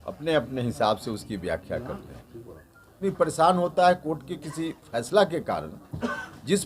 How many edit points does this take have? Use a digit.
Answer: 1